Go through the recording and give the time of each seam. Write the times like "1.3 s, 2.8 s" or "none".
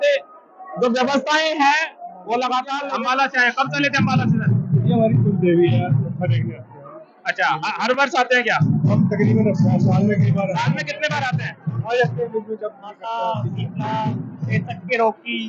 2.7 s, 13.0 s